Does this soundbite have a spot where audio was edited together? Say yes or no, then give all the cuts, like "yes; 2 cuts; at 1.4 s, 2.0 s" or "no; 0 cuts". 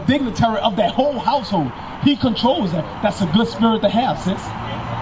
no; 0 cuts